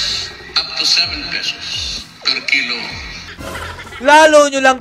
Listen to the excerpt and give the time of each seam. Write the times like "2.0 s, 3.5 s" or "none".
3.3 s